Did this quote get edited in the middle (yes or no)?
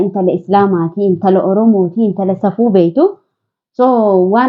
no